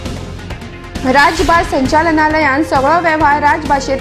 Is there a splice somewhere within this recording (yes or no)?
yes